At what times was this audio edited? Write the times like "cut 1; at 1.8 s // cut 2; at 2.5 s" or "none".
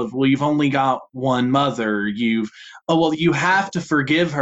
none